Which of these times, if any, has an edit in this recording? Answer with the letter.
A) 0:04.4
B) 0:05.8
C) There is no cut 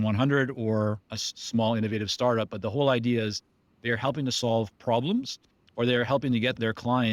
C